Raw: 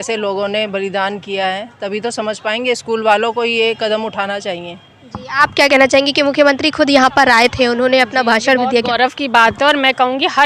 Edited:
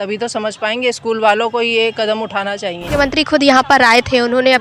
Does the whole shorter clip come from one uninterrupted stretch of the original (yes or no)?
no